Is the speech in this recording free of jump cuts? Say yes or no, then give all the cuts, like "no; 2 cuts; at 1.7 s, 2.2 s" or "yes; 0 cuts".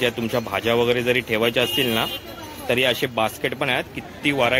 yes; 0 cuts